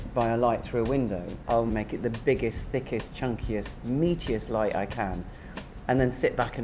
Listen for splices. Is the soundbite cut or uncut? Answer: cut